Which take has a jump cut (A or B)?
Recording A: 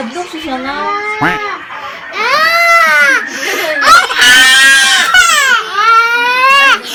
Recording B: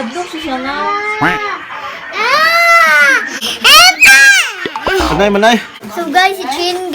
B